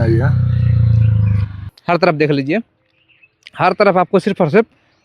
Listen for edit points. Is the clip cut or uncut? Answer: cut